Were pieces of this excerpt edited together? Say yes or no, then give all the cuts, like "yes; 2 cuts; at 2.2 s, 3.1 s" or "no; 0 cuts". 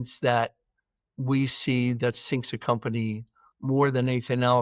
no; 0 cuts